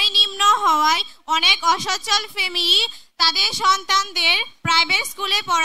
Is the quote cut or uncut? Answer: uncut